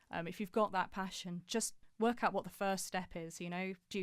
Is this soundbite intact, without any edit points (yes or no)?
no